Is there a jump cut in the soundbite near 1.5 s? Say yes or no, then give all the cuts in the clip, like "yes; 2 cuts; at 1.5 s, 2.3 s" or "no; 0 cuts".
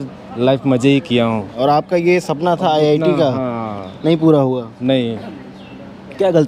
yes; 1 cut; at 1.5 s